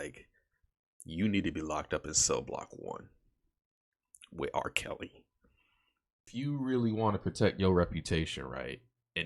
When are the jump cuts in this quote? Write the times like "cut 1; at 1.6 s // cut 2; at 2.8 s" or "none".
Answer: cut 1; at 6.3 s

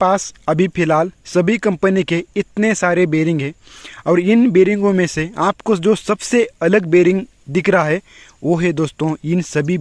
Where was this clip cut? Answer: none

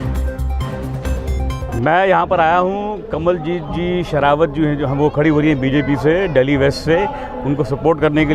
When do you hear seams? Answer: cut 1; at 1.8 s

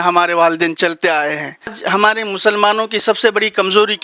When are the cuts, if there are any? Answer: cut 1; at 1.8 s

